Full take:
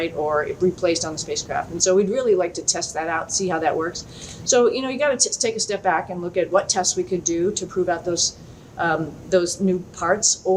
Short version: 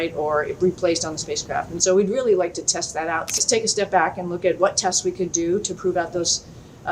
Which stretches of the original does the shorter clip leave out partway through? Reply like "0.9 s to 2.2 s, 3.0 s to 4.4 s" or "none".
3.3 s to 5.3 s